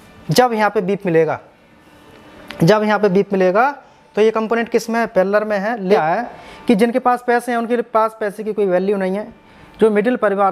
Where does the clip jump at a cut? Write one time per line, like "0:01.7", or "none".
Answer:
0:06.0